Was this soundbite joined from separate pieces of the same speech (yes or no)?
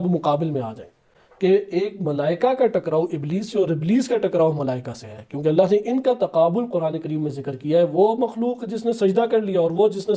no